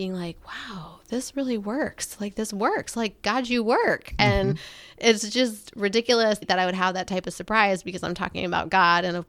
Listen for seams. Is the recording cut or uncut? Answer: uncut